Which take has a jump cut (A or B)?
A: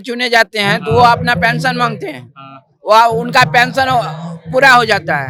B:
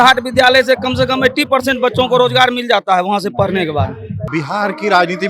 B